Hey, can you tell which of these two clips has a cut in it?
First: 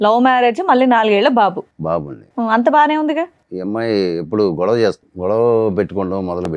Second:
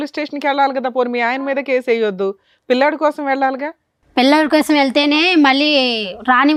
first; 2 cuts; at 3.4 s, 5.1 s

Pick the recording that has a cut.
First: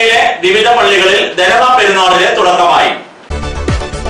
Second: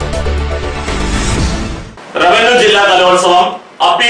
second; 1 cut; at 1.8 s

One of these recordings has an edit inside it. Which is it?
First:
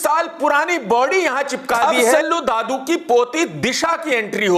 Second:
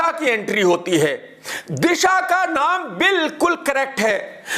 first; 1 cut; at 2.1 s

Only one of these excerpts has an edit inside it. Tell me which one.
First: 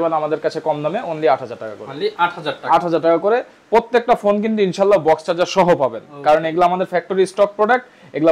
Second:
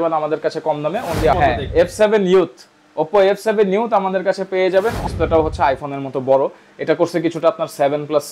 second; 2 cuts; at 1.4 s, 5.0 s

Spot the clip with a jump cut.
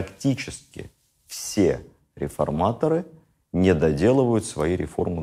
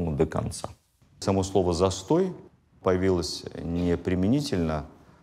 second; 1 cut; at 1.2 s

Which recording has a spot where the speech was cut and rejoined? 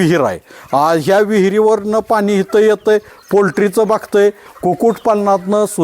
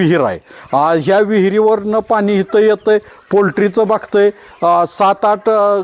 first; 1 cut; at 4.5 s

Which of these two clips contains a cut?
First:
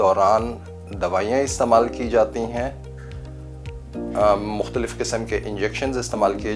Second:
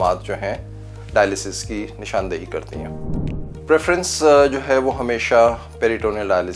second; 1 cut; at 3.1 s

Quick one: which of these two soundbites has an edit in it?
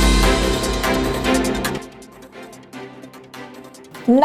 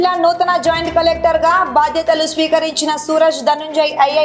first; 1 cut; at 1.7 s

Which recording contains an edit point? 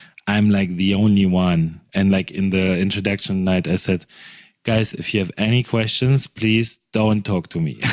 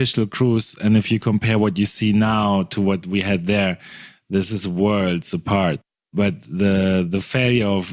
second; 2 cuts; at 1.1 s, 6.1 s

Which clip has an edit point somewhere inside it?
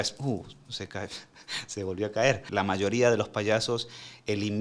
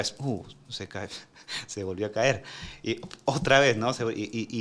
first; 1 cut; at 2.4 s

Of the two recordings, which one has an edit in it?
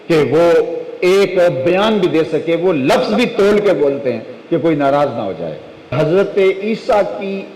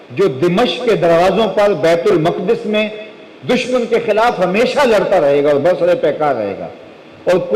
first; 1 cut; at 5.9 s

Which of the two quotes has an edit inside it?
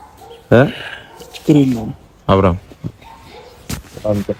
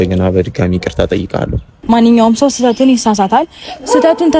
second; 1 cut; at 1.7 s

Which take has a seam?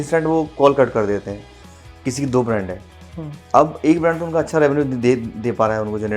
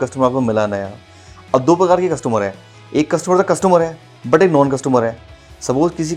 first; 1 cut; at 1.6 s

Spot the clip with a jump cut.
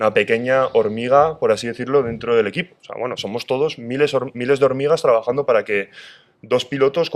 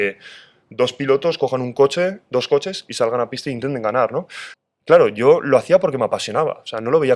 second; 1 cut; at 4.4 s

